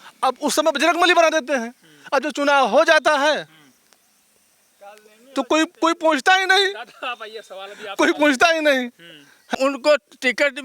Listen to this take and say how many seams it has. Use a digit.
1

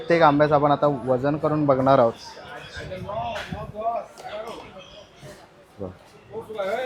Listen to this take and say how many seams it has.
0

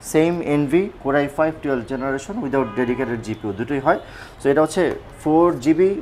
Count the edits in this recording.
0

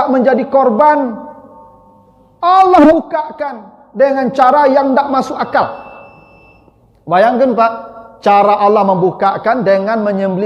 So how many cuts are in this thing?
0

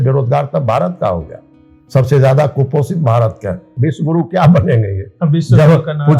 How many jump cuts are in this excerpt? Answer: 1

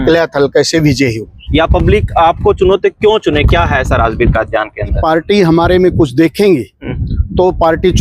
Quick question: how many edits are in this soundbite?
2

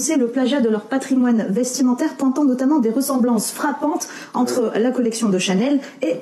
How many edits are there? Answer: 0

